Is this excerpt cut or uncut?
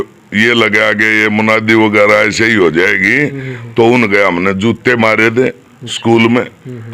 uncut